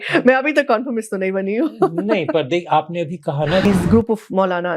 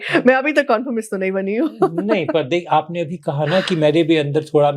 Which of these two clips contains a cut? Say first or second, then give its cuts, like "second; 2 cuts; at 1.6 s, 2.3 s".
first; 1 cut; at 3.6 s